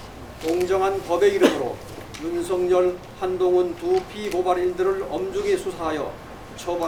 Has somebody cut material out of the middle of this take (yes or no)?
no